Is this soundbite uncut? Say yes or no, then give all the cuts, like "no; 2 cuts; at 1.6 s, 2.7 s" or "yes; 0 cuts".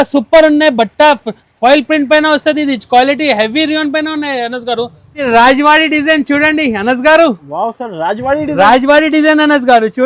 no; 1 cut; at 5.2 s